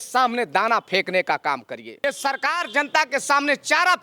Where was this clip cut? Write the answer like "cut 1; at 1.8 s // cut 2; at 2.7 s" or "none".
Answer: cut 1; at 1.9 s